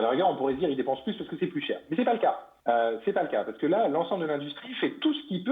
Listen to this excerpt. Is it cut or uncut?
cut